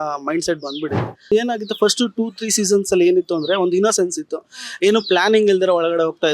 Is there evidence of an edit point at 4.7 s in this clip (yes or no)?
no